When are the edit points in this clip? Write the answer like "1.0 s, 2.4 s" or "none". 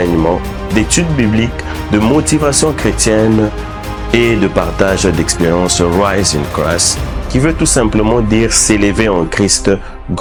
none